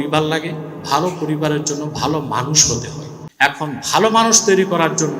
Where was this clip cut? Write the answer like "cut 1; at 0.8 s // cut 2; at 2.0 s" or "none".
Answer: none